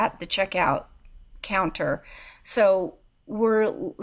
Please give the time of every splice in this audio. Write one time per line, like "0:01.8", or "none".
none

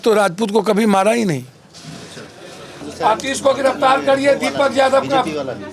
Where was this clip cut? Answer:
0:02.9

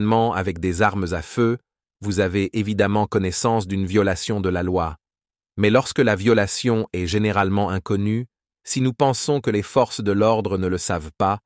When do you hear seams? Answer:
none

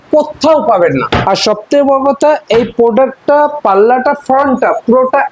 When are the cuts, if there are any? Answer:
0:01.0

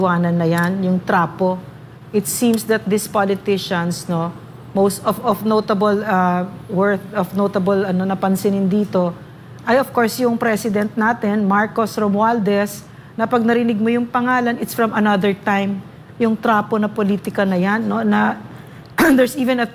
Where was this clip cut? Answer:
none

